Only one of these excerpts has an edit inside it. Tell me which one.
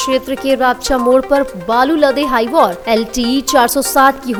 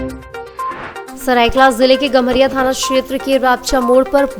second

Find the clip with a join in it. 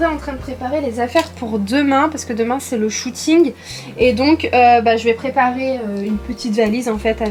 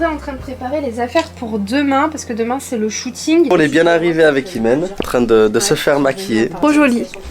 second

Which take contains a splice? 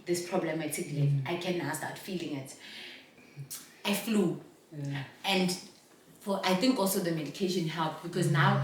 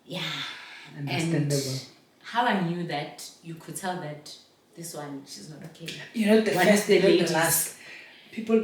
first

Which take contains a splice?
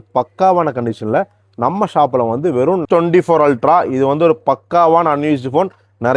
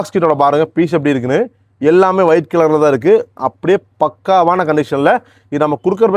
first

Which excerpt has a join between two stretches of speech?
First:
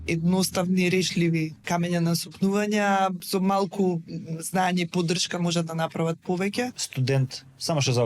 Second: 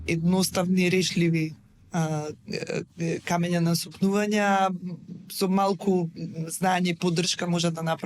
first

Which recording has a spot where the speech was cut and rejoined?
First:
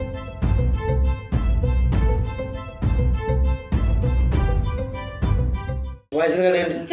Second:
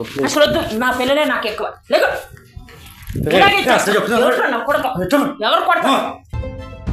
first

